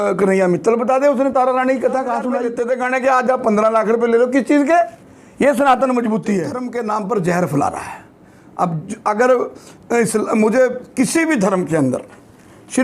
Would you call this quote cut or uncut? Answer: cut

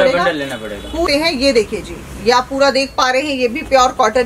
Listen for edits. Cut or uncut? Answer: cut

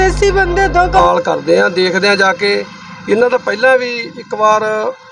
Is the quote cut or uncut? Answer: cut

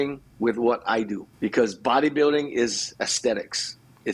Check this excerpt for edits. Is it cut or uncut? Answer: cut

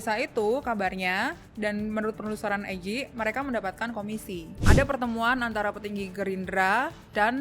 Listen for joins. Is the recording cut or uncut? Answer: cut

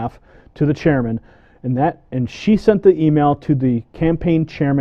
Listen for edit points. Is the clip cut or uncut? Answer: uncut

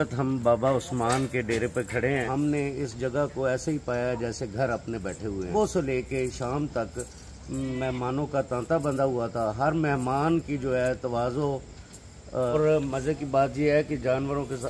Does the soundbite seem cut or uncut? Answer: cut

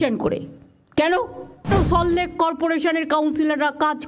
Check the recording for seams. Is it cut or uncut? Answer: cut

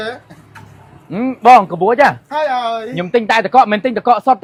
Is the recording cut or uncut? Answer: uncut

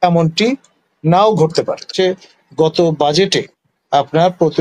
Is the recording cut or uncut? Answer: cut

